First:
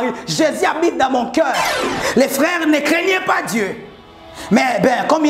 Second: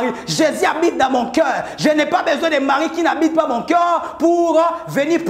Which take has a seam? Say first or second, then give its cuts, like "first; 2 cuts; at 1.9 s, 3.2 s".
first; 1 cut; at 1.7 s